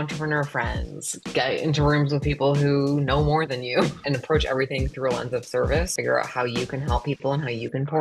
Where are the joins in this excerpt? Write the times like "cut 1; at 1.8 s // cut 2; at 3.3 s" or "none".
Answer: cut 1; at 4.0 s // cut 2; at 5.9 s